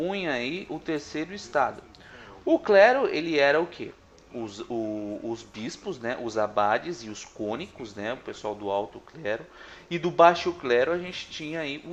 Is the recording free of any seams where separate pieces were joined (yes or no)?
yes